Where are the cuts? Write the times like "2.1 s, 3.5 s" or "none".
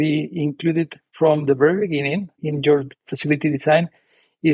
1.0 s